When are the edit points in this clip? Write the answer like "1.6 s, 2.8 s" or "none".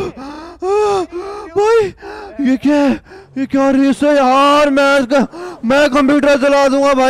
none

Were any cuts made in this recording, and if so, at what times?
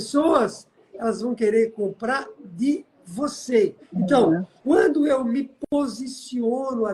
3.8 s, 4.5 s

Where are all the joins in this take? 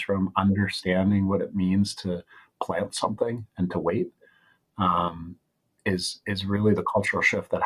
none

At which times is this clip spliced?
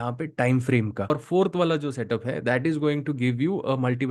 1.1 s

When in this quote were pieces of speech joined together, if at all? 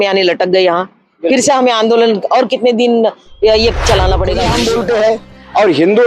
4.5 s

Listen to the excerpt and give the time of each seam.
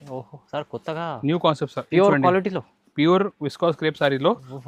none

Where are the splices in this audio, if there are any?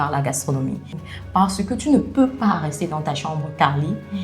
0.9 s

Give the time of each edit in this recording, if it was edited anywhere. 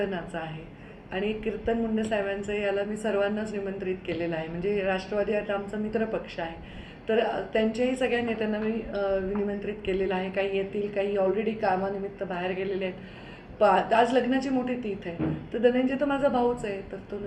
none

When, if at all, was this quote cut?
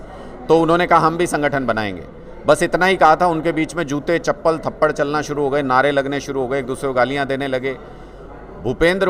none

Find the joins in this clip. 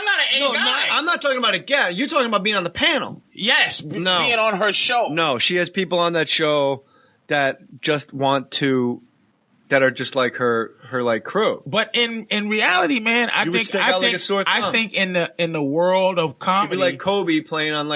9.5 s

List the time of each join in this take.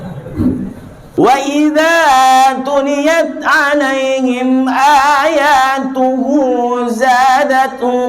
0.9 s

